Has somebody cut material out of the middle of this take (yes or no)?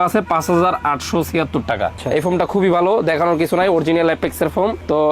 yes